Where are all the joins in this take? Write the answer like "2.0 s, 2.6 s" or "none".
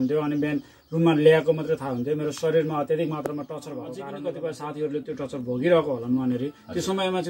3.9 s